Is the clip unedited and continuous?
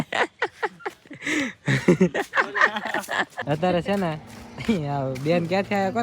no; 1 cut; at 3.3 s

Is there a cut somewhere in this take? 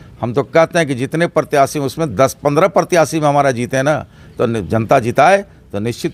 no; 0 cuts

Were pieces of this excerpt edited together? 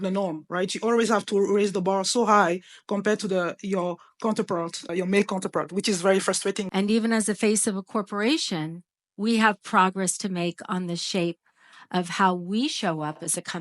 yes; 2 cuts; at 4.8 s, 6.6 s

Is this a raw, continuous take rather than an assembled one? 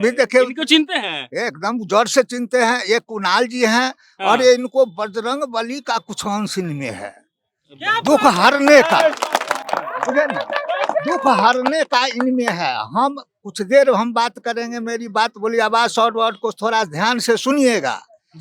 yes; 0 cuts

